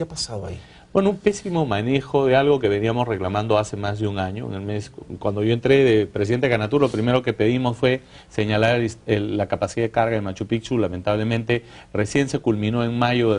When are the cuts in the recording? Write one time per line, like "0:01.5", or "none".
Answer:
0:04.2